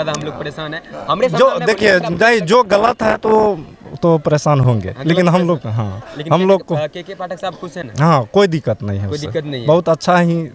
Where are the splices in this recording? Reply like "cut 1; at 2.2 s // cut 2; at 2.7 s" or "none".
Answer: none